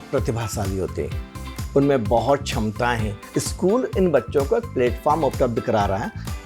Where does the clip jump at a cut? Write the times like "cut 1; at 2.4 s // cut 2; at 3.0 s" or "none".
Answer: cut 1; at 3.1 s